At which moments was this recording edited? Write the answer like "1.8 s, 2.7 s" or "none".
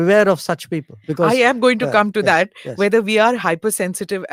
none